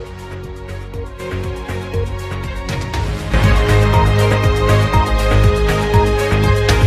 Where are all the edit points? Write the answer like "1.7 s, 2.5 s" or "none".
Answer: none

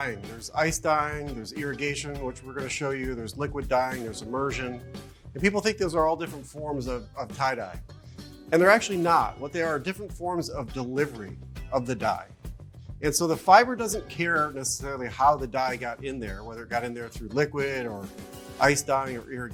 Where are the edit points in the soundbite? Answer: none

